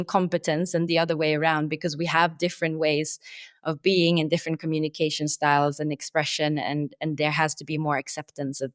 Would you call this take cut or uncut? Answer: uncut